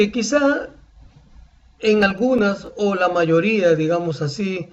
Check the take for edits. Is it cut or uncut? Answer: uncut